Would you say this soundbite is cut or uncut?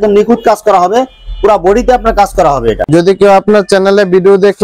cut